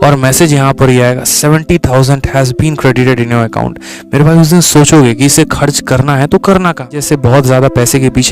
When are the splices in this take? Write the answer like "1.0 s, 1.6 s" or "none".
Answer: 7.0 s